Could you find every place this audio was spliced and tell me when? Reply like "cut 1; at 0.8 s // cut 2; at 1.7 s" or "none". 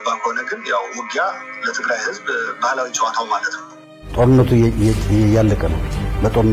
cut 1; at 3.8 s